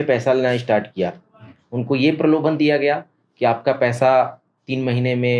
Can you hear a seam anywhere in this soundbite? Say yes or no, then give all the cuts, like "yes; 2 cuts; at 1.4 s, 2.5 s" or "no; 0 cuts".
no; 0 cuts